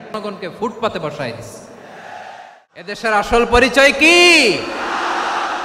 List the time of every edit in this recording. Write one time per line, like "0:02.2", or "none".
0:03.0